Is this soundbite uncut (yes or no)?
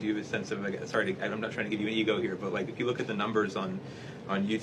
yes